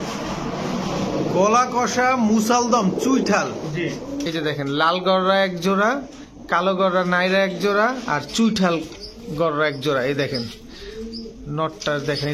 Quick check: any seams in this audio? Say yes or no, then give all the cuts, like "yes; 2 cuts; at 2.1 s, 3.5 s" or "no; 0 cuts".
yes; 1 cut; at 4.2 s